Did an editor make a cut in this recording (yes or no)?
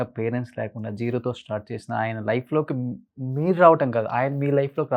no